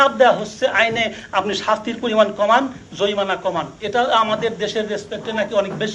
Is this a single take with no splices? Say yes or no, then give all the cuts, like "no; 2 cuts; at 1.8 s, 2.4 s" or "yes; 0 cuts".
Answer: yes; 0 cuts